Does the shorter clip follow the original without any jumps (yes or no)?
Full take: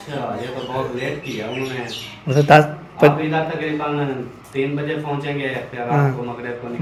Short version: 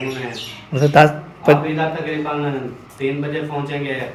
yes